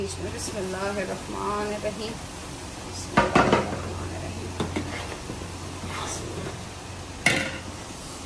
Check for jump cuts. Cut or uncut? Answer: uncut